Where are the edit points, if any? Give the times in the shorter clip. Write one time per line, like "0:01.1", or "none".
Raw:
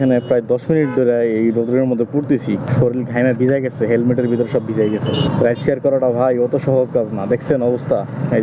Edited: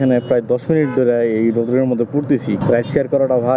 0:02.6

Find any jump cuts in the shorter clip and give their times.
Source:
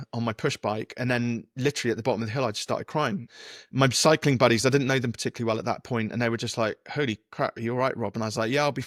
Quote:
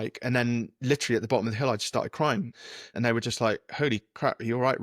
0:02.9

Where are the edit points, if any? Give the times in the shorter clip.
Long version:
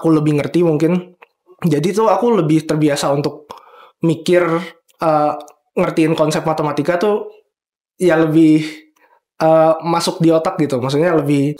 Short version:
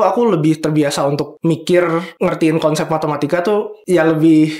0:01.3
0:02.1
0:03.8

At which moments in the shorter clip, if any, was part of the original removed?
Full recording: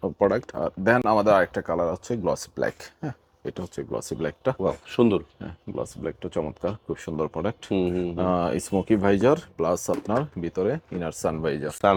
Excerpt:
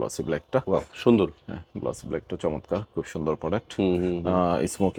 none

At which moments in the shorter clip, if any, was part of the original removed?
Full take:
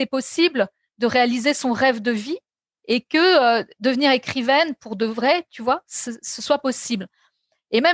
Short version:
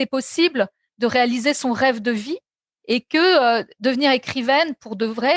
none

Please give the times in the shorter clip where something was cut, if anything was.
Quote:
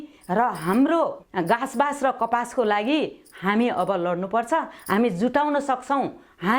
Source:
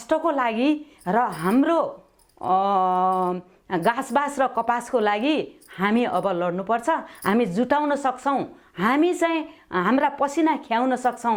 0:01.2

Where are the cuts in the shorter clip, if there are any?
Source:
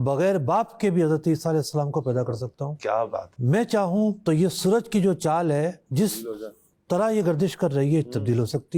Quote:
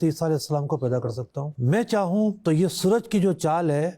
0:01.5

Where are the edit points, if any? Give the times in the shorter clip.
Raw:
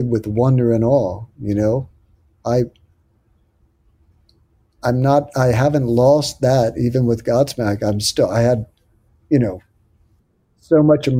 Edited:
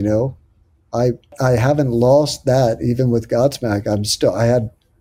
0:01.3

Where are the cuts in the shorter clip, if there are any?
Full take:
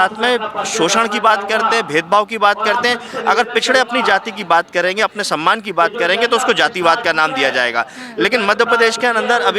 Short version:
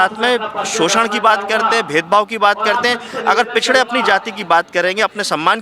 none

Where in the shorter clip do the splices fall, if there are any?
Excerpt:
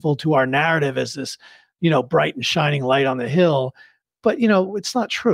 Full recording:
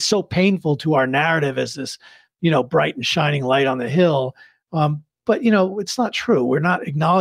0:04.0

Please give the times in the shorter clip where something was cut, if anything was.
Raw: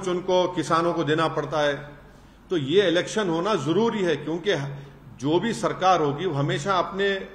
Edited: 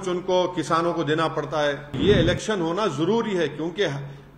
0:02.0

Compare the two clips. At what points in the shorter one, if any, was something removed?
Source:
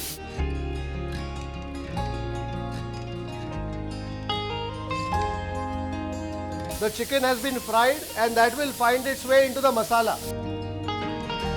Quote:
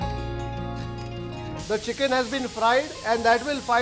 0:01.6

